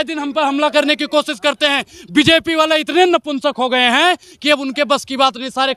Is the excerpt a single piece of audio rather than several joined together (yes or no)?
yes